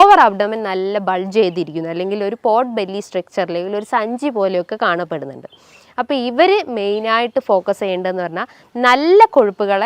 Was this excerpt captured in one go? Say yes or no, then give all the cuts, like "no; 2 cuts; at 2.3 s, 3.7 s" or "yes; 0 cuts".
yes; 0 cuts